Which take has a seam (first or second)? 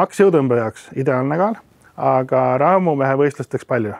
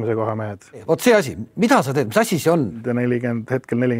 second